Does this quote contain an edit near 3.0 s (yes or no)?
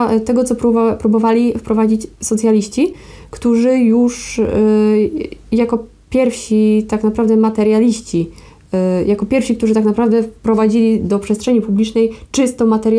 no